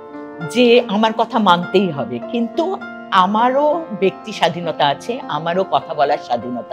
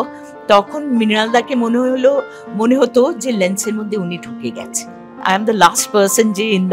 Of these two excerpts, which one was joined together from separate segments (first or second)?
second